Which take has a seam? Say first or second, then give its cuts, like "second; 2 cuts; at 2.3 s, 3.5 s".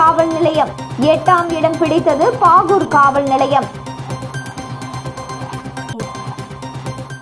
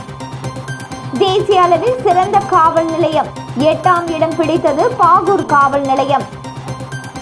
second; 1 cut; at 1.0 s